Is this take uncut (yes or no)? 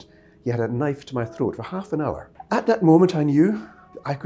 no